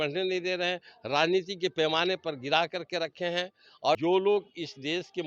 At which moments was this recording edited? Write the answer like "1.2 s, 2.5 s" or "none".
4.0 s

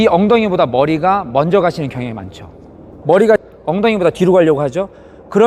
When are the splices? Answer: 2.9 s, 3.5 s

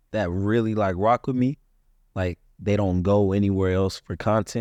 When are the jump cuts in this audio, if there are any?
none

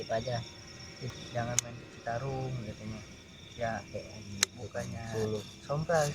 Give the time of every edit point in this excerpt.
1.0 s

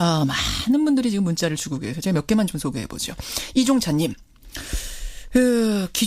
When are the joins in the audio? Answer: 2.4 s

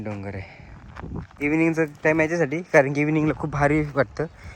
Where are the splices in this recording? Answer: 1.3 s

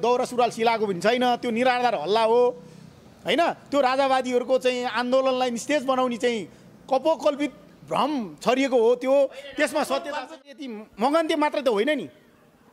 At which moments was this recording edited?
10.4 s

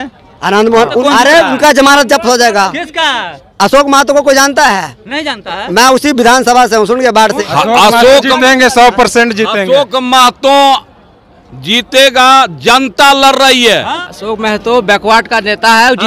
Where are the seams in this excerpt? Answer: 1.0 s, 7.4 s, 14.0 s

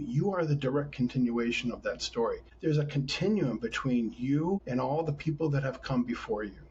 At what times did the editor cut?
2.5 s, 4.6 s

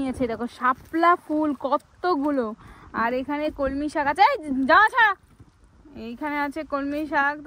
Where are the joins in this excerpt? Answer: none

